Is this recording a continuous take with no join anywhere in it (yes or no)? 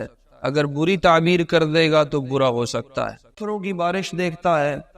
no